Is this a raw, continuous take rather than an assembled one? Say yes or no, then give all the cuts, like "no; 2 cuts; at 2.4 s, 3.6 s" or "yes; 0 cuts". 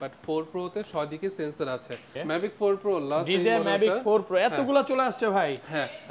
no; 1 cut; at 2.1 s